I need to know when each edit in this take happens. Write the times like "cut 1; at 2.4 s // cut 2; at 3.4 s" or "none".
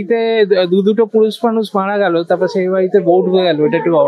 none